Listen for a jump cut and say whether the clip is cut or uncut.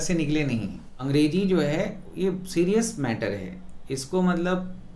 cut